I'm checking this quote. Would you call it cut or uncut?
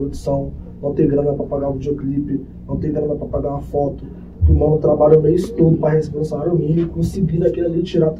uncut